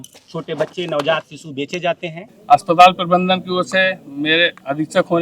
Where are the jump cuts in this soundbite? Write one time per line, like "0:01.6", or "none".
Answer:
0:02.4